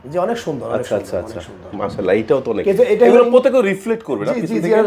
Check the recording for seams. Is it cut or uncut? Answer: uncut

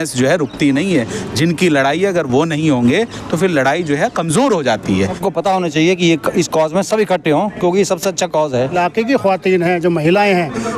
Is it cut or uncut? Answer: cut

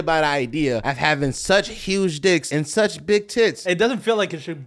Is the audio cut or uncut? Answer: cut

